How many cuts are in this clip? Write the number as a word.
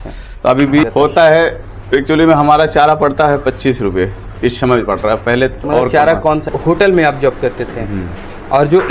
two